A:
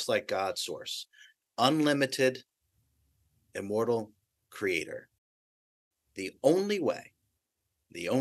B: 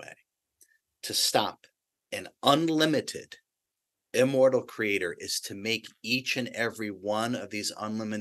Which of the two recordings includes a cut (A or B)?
A